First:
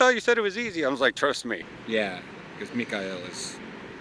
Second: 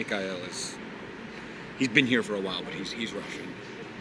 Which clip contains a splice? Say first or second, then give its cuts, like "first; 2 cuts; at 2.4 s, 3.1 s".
first; 1 cut; at 1.7 s